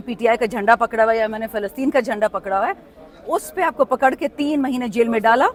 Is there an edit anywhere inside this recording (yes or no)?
no